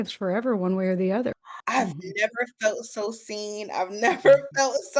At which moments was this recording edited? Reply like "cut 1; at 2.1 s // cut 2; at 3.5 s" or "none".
cut 1; at 1.4 s